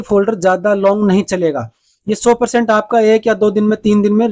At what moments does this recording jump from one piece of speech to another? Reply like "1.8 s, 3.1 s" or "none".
none